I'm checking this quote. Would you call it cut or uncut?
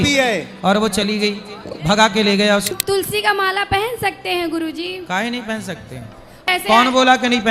cut